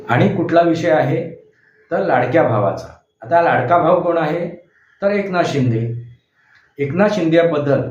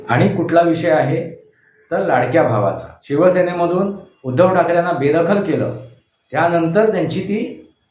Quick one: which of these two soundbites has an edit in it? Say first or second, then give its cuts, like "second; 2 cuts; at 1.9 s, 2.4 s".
second; 1 cut; at 2.9 s